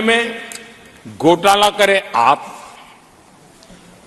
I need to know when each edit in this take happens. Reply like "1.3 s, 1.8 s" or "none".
none